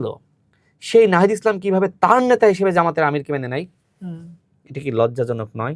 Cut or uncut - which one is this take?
uncut